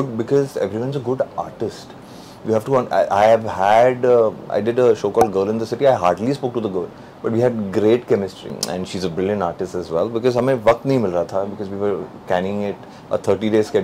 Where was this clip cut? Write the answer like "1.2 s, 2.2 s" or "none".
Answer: 8.5 s